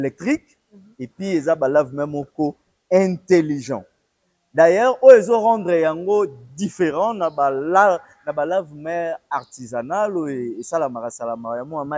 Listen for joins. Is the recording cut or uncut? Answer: uncut